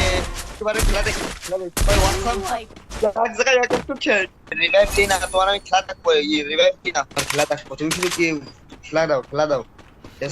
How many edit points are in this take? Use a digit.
3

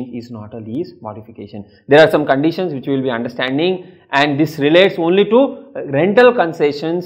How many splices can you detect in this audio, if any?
0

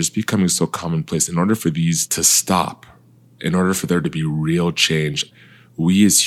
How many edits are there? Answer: 1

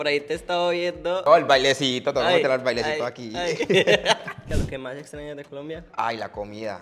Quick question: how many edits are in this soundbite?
2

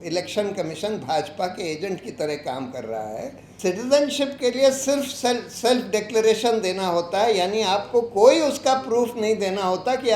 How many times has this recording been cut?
1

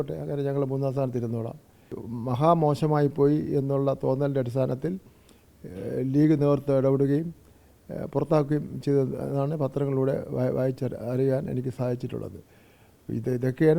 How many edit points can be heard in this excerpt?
1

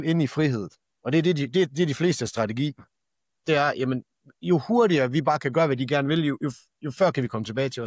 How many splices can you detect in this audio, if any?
0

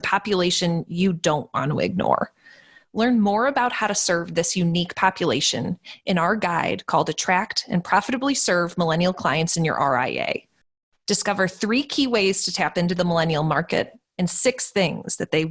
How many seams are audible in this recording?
0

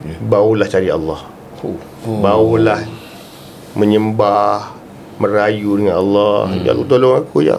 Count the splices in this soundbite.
1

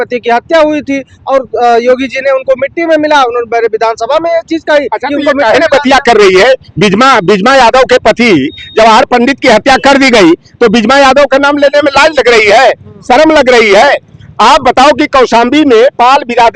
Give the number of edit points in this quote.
0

